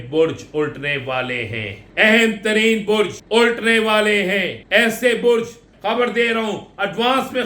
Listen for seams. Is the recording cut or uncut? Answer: cut